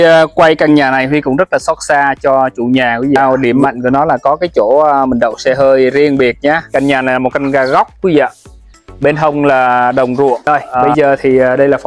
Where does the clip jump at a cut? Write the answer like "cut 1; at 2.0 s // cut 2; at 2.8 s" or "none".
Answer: cut 1; at 3.2 s // cut 2; at 6.6 s // cut 3; at 10.7 s